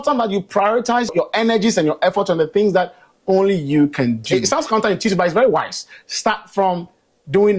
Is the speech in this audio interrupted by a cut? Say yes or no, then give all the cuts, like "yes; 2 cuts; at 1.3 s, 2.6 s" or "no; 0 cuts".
yes; 2 cuts; at 1.1 s, 4.5 s